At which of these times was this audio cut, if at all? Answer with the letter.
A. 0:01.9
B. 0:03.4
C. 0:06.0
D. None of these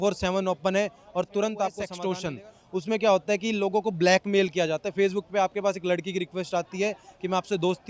A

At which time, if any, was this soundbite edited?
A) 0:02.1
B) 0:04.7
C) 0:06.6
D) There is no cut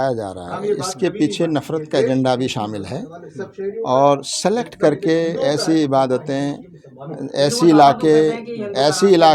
D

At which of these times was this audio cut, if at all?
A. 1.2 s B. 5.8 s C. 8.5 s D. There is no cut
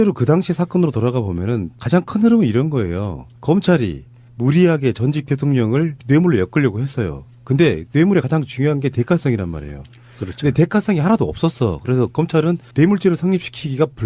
C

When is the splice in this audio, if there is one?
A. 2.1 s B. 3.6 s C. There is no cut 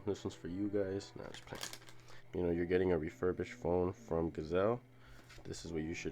A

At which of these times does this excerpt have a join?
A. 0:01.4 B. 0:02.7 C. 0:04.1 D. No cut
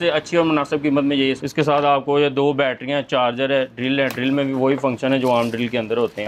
A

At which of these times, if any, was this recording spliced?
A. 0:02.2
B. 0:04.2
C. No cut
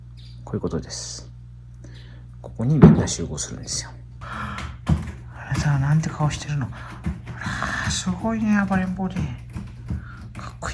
B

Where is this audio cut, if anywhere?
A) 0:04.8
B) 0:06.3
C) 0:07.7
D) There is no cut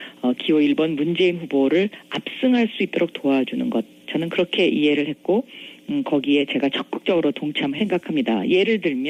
D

